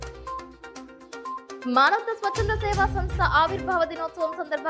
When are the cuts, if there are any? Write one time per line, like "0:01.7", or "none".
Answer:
none